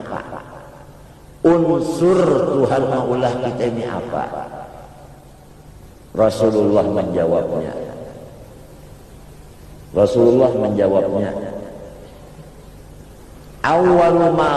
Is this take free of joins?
yes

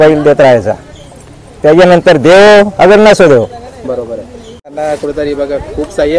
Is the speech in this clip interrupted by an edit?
yes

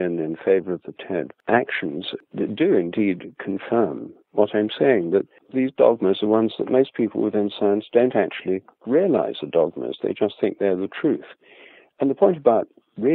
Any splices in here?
yes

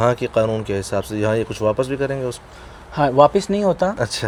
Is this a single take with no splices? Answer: yes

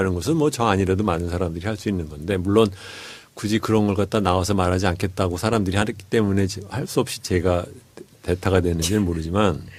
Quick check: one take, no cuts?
yes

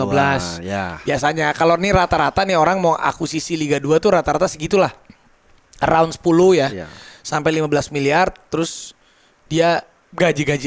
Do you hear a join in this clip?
no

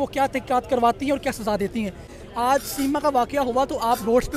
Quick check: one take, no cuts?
yes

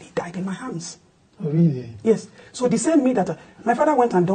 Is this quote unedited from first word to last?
yes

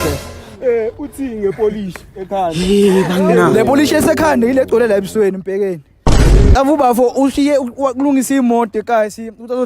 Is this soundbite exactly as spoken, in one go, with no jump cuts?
no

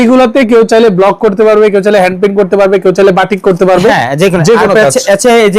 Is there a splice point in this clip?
no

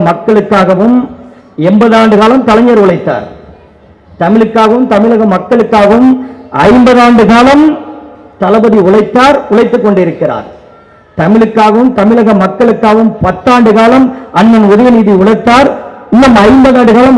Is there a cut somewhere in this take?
no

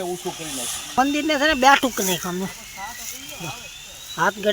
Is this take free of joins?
no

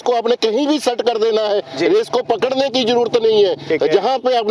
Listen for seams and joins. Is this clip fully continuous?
yes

